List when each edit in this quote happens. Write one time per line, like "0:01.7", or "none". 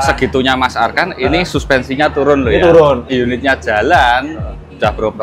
0:03.1